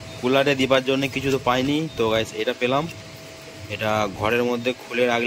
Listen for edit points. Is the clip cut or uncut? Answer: uncut